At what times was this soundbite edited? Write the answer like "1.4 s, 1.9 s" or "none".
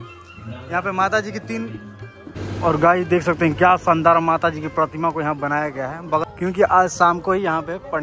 2.4 s, 6.2 s